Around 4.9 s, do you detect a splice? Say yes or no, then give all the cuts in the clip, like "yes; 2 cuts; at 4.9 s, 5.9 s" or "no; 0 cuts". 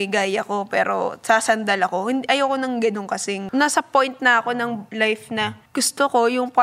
yes; 3 cuts; at 3.4 s, 4.9 s, 5.6 s